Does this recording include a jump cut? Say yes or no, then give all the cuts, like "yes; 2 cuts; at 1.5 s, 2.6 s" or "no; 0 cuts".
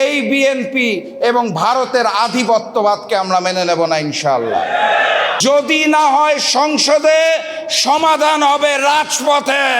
yes; 1 cut; at 5.3 s